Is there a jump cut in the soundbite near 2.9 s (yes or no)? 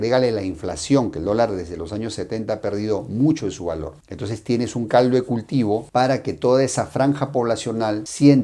no